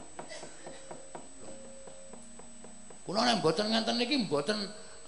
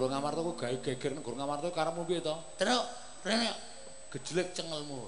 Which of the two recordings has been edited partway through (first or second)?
first